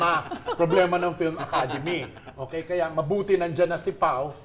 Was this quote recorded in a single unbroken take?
yes; 0 cuts

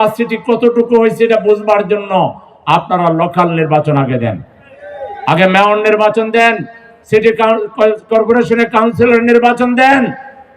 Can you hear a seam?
no; 0 cuts

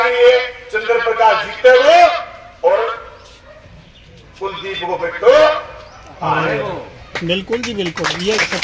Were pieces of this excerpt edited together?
no; 0 cuts

